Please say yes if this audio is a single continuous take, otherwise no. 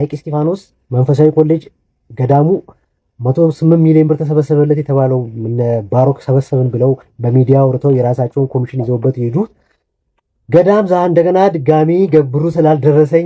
yes